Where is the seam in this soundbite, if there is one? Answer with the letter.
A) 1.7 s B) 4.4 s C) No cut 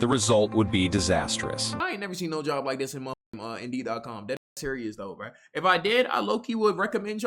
A